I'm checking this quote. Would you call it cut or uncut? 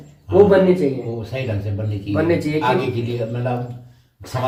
uncut